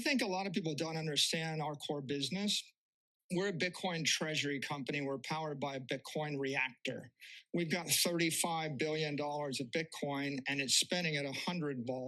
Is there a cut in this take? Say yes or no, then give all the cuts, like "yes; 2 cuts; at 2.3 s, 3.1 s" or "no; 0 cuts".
no; 0 cuts